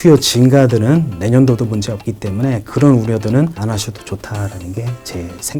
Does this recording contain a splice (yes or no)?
no